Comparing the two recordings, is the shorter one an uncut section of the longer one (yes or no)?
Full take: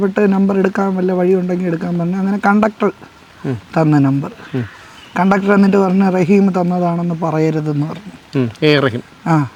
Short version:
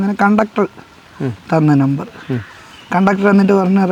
yes